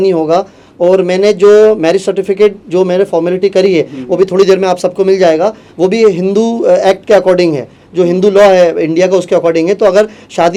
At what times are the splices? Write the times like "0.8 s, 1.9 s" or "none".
none